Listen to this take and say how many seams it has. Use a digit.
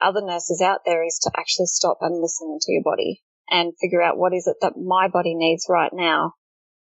0